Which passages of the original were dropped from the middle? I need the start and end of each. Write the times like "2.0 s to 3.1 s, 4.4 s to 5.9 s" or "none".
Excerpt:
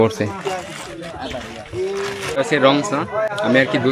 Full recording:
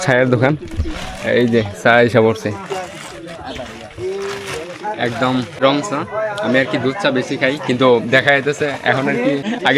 4.8 s to 5.5 s